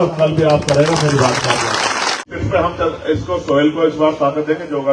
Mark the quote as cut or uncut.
cut